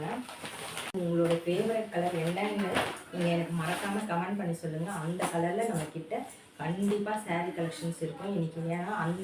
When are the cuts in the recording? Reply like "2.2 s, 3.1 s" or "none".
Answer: 1.0 s